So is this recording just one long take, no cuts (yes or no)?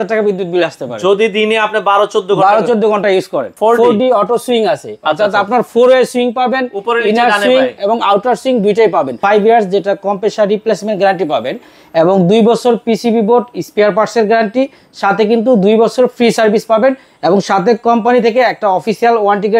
no